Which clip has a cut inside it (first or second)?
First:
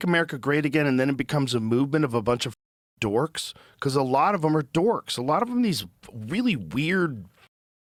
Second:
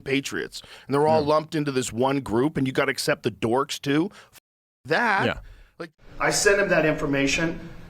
second